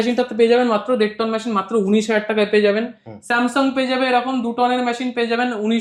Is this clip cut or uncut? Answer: uncut